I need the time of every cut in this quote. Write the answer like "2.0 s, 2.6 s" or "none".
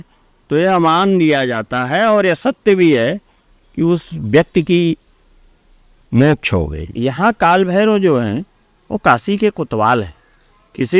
6.8 s